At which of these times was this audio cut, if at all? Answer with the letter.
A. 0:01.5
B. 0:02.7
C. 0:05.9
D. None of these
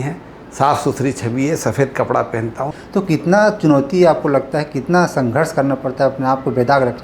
B